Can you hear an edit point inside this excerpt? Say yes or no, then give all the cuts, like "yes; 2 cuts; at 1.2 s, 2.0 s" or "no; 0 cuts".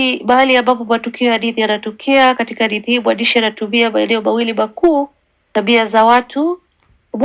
no; 0 cuts